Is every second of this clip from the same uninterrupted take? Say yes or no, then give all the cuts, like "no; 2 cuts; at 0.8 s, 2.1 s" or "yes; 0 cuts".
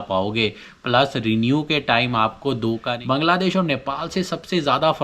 no; 1 cut; at 2.9 s